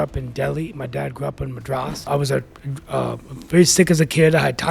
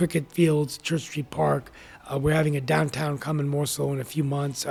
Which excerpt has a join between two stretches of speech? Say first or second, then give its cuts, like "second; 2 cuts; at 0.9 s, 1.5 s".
first; 1 cut; at 2.1 s